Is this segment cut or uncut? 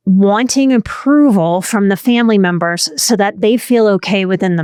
uncut